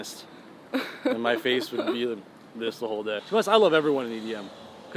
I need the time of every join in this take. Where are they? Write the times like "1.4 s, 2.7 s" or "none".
3.2 s